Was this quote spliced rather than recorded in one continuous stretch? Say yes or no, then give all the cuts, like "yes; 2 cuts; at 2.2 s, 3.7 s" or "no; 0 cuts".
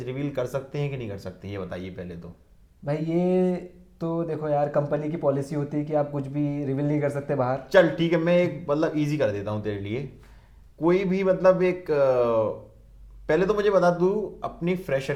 no; 0 cuts